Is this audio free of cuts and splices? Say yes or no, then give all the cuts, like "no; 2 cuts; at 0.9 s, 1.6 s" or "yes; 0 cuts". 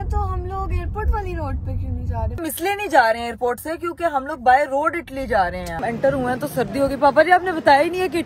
no; 2 cuts; at 2.5 s, 5.8 s